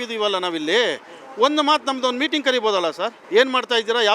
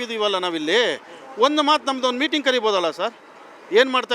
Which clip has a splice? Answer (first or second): first